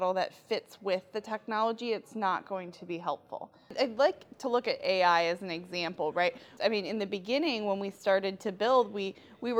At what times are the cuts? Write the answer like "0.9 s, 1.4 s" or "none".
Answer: 3.7 s, 6.5 s